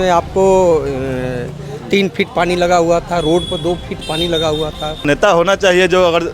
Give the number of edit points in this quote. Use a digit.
1